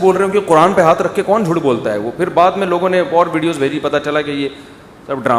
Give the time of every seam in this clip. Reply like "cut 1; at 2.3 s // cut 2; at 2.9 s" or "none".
none